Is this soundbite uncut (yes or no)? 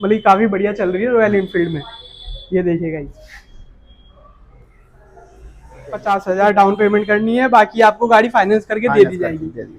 no